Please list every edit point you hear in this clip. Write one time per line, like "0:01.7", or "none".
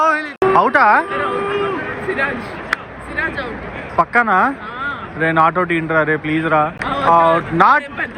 none